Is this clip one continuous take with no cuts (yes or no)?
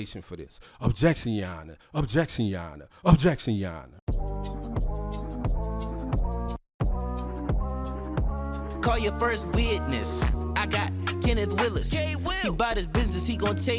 no